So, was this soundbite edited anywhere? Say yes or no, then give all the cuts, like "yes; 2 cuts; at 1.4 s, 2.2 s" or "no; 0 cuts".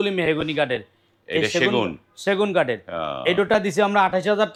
no; 0 cuts